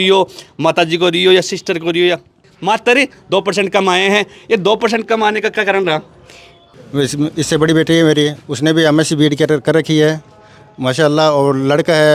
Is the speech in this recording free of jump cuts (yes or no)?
no